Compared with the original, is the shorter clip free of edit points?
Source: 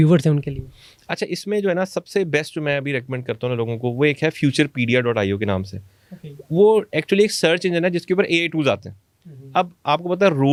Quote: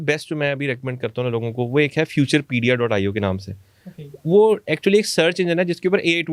yes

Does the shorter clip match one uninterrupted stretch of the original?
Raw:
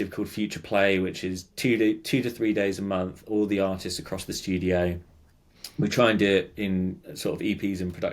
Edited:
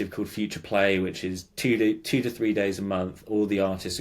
yes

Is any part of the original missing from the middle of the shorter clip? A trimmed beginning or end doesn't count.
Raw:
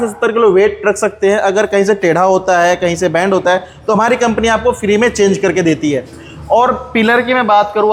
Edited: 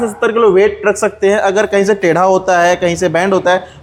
no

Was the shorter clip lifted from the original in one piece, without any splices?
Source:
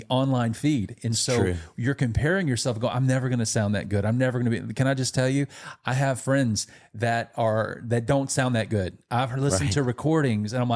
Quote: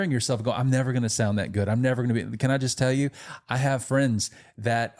yes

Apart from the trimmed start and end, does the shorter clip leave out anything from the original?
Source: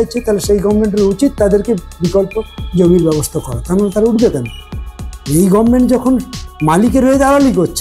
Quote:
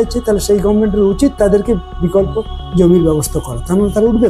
no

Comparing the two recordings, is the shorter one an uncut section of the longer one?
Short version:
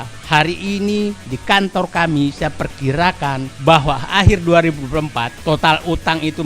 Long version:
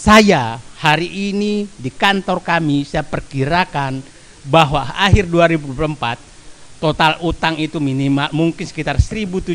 no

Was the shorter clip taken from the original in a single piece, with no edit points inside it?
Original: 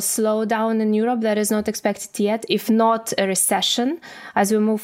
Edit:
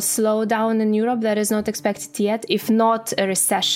yes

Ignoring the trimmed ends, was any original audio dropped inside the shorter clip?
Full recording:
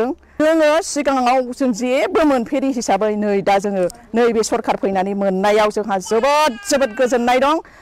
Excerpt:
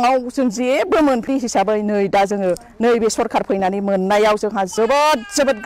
yes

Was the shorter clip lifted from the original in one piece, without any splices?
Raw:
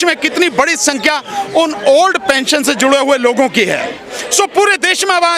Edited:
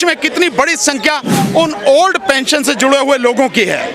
yes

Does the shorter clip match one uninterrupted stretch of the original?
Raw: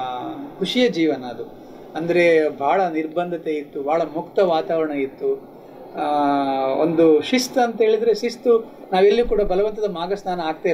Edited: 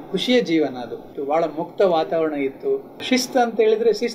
no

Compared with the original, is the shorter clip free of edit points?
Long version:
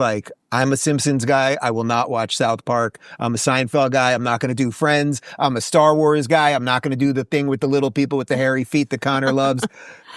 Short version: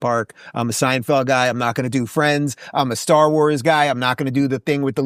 yes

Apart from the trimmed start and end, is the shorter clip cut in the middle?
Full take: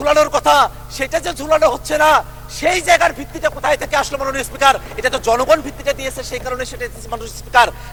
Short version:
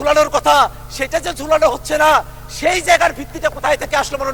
no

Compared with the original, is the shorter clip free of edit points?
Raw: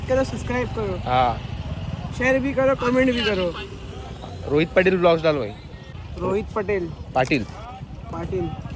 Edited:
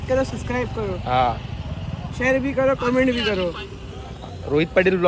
yes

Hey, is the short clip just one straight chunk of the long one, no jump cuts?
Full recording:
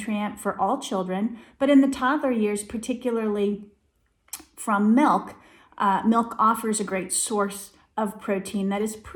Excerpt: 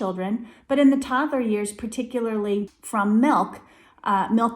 no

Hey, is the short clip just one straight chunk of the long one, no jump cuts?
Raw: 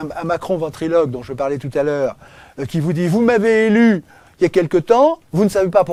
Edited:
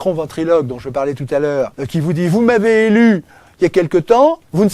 no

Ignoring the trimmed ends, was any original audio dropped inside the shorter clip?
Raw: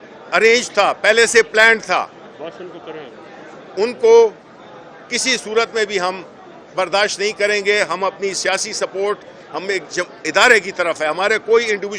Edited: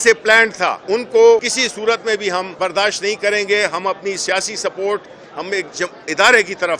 yes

